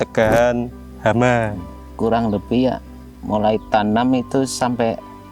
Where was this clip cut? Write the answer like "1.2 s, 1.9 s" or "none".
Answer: 1.8 s